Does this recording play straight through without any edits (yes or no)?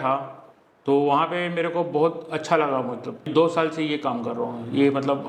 no